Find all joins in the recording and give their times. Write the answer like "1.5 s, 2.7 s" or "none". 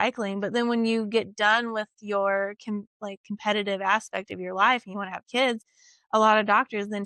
none

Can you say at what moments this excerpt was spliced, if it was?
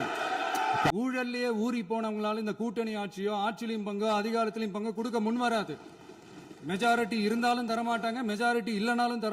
0.9 s

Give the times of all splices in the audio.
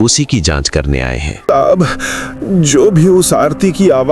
1.3 s

